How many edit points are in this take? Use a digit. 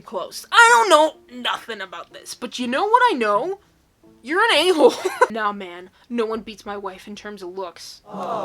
1